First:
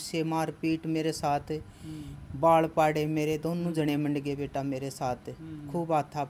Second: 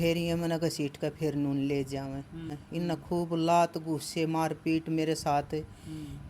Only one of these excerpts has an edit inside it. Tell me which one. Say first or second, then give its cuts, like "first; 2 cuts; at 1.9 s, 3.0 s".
second; 1 cut; at 2.6 s